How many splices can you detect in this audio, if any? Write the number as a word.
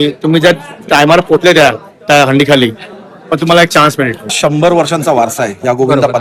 one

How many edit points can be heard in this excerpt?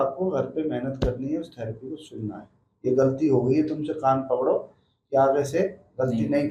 zero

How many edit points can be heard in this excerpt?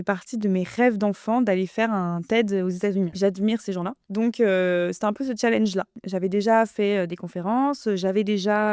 three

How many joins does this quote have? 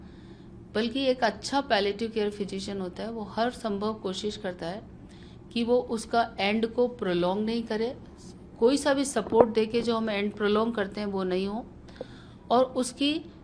zero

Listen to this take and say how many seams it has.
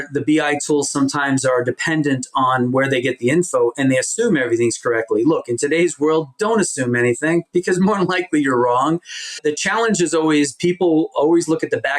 one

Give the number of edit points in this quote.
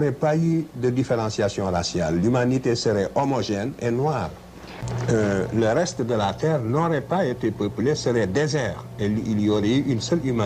one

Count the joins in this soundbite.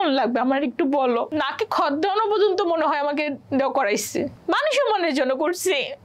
two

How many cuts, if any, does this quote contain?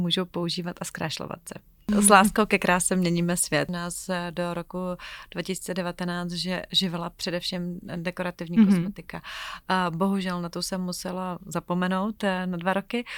two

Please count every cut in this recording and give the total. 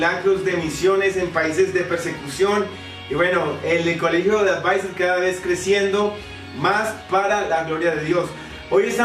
one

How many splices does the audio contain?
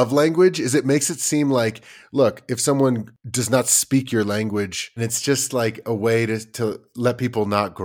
two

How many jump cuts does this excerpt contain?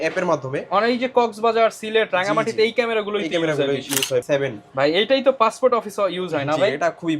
one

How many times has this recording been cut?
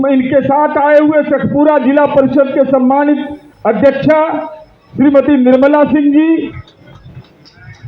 zero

